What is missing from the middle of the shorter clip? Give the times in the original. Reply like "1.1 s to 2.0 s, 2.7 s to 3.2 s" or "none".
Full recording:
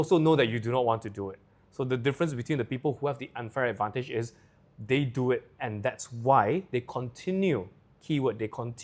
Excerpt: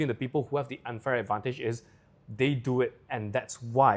none